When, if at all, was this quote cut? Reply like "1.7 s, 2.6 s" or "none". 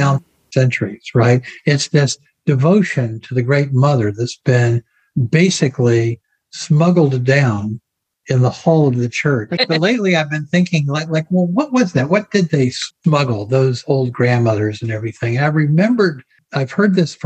9.6 s